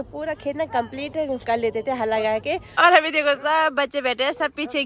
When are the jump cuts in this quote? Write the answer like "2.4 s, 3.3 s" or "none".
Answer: 2.7 s